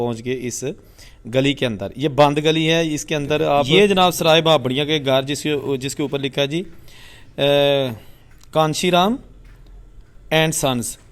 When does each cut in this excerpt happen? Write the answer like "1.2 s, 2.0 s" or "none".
3.7 s